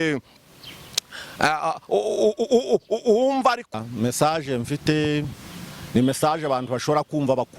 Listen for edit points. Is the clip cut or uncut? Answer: cut